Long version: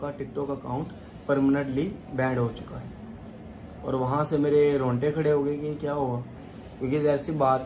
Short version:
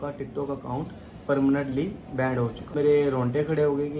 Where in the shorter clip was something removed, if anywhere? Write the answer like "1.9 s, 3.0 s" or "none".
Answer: 2.8 s